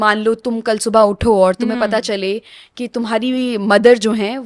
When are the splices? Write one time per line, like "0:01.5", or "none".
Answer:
none